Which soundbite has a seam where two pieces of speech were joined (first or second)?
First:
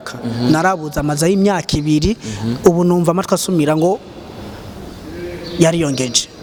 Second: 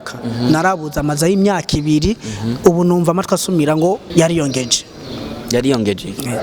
second